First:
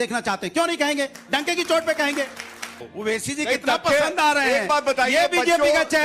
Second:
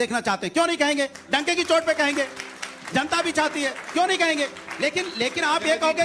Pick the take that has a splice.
first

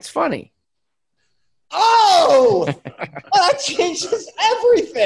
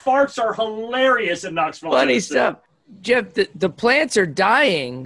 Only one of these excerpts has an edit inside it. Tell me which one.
second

